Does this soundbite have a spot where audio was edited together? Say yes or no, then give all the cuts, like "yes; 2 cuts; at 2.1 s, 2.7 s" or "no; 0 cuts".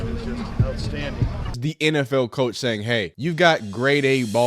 yes; 2 cuts; at 1.6 s, 3.1 s